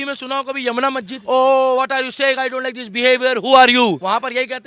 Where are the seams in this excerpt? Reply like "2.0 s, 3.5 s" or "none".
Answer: 1.2 s